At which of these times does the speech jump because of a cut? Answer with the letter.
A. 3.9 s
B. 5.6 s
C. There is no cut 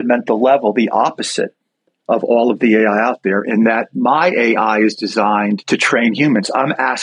B